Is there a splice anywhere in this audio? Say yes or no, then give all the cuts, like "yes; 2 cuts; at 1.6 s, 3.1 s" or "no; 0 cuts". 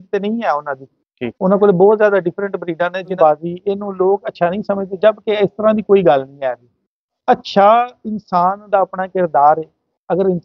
yes; 1 cut; at 3.2 s